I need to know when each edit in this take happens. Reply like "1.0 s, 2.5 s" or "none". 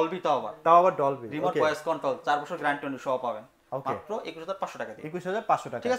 none